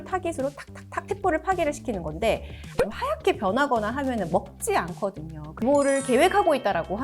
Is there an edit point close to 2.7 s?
yes; 2 cuts; at 2.7 s, 5.6 s

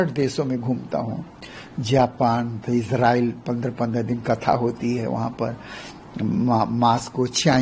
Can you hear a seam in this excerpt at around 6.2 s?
no; 0 cuts

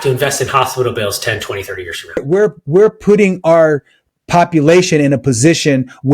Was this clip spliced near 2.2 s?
yes; 1 cut; at 2.2 s

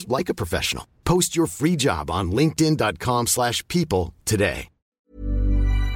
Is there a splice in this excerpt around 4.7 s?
yes; 1 cut; at 4.7 s

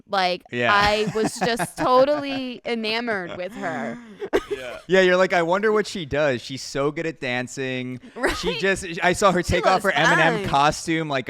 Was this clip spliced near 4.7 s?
yes; 1 cut; at 4.7 s

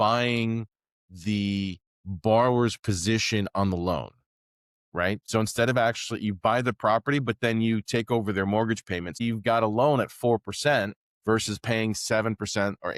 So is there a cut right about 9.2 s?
yes; 2 cuts; at 5.2 s, 9.2 s

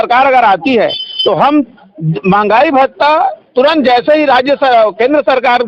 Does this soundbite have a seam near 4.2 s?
no; 0 cuts

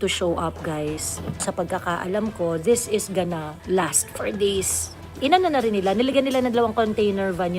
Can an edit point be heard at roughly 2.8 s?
no; 2 cuts; at 1.4 s, 5.0 s

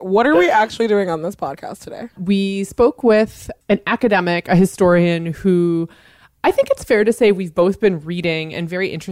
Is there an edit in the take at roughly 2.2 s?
yes; 1 cut; at 2.2 s

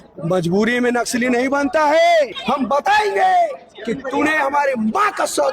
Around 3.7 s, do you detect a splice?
no; 1 cut; at 2.4 s

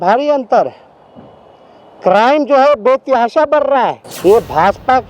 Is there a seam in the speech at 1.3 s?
no; 1 cut; at 4.1 s

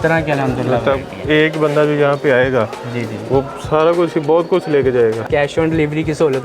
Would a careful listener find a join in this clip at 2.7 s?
no; 1 cut; at 5.3 s

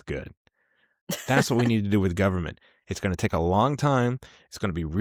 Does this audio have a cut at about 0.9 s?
no; 0 cuts

